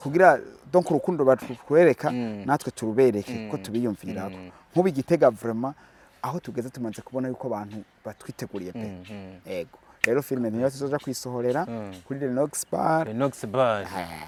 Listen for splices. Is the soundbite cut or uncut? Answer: uncut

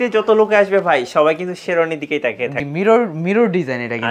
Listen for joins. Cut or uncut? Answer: cut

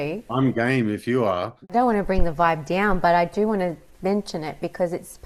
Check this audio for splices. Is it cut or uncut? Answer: cut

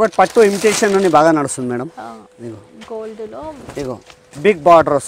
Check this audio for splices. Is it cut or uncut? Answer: uncut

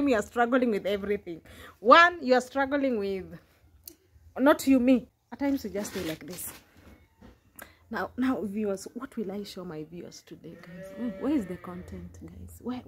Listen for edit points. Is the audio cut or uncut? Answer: cut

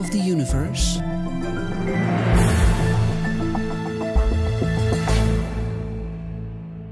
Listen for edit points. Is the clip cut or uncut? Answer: uncut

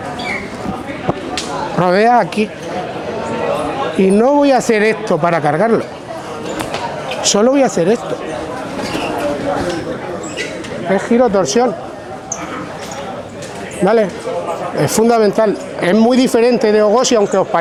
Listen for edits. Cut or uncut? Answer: uncut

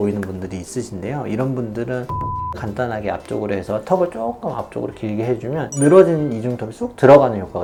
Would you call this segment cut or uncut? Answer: uncut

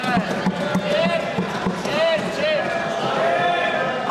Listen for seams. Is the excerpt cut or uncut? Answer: uncut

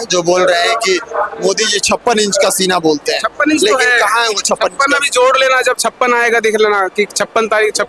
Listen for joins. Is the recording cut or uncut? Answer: uncut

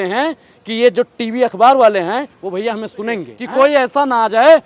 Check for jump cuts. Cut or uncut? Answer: cut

